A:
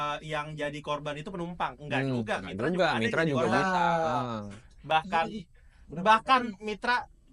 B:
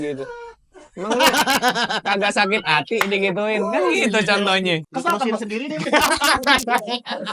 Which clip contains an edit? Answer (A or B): B